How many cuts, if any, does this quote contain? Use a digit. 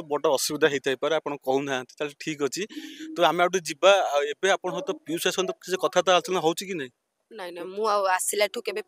0